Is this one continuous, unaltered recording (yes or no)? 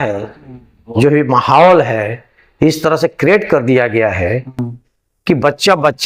yes